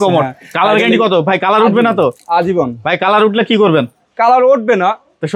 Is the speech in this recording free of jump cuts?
yes; 0 cuts

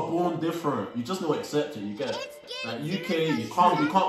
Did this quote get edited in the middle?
yes; 1 cut; at 2.4 s

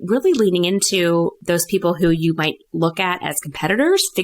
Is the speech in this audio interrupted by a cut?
yes; 1 cut; at 1.4 s

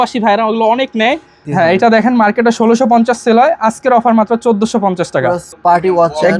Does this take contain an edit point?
yes; 2 cuts; at 1.4 s, 5.5 s

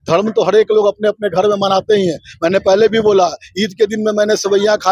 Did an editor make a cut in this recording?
no; 0 cuts

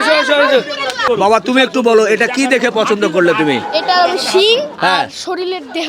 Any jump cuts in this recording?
yes; 1 cut; at 1.0 s

